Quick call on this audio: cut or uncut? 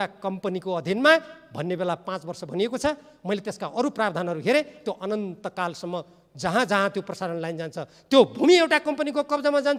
uncut